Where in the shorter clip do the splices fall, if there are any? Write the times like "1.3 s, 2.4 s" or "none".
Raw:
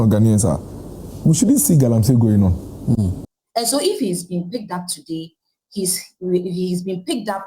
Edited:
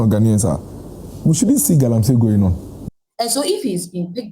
2.8 s